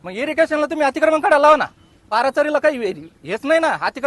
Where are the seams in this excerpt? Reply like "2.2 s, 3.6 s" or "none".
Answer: 2.0 s